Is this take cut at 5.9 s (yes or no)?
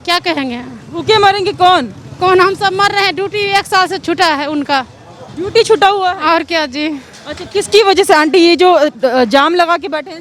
no